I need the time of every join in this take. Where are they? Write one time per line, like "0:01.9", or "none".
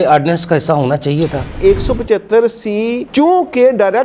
0:01.5